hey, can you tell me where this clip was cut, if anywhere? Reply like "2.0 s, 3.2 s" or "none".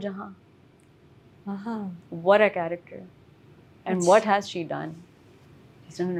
none